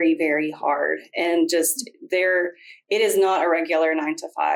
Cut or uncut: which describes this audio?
uncut